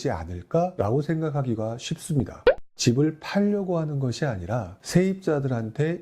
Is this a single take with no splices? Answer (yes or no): no